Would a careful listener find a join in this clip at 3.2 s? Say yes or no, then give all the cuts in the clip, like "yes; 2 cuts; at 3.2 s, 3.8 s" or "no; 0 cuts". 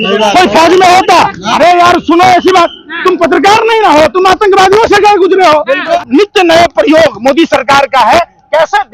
no; 1 cut; at 6.0 s